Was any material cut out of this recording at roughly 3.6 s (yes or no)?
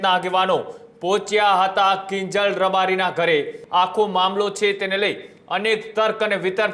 yes